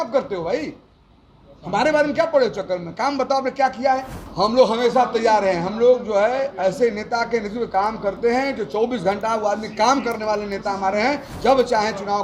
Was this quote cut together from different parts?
yes; 2 cuts; at 4.2 s, 11.3 s

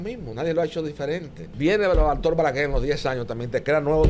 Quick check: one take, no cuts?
no; 1 cut; at 1.4 s

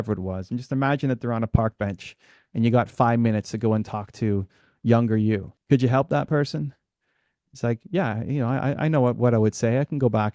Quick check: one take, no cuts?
no; 1 cut; at 5.5 s

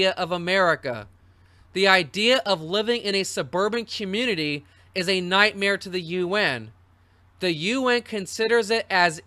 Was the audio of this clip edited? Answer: no; 0 cuts

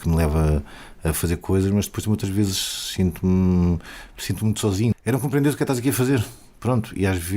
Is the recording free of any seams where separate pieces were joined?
no; 1 cut; at 4.9 s

